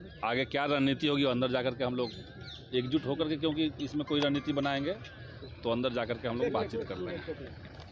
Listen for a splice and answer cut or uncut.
uncut